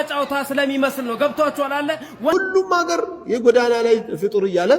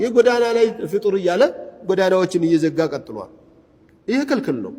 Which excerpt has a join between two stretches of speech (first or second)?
first